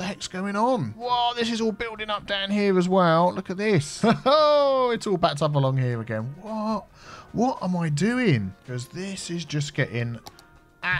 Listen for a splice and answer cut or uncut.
cut